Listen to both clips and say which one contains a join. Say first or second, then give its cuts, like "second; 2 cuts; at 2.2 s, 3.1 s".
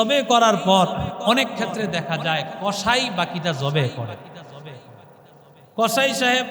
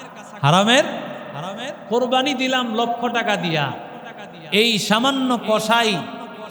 first; 1 cut; at 1.2 s